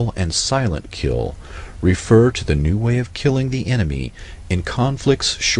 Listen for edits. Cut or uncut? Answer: uncut